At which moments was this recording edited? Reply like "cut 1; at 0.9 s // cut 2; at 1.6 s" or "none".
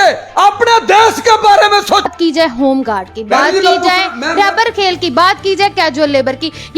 cut 1; at 2.1 s